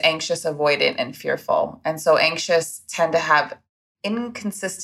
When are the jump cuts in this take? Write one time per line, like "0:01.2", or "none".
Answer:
0:03.6